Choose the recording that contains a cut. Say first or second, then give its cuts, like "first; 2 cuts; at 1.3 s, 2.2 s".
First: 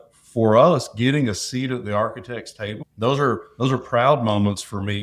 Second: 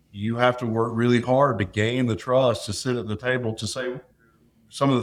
first; 1 cut; at 2.8 s